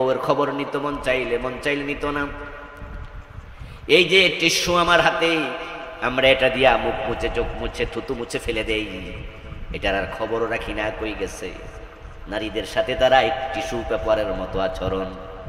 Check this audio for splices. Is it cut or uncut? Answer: uncut